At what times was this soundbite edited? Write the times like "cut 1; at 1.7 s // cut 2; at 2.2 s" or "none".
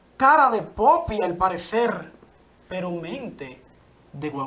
none